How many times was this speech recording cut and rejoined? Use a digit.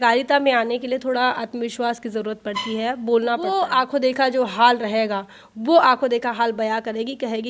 1